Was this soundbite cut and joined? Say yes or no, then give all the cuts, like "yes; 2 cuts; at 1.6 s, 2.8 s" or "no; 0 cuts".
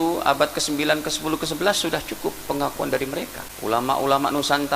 yes; 1 cut; at 3.4 s